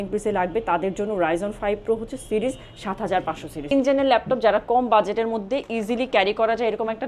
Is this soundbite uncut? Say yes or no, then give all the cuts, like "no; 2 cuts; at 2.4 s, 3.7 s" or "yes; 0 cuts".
no; 1 cut; at 3.7 s